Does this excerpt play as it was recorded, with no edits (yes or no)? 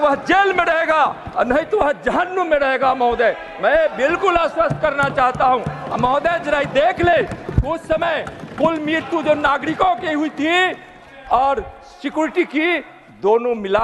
yes